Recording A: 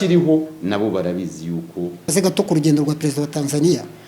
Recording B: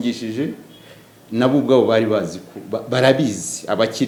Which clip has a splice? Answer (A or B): A